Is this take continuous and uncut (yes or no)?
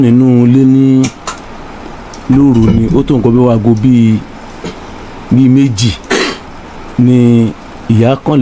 yes